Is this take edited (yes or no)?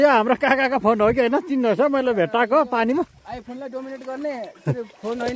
no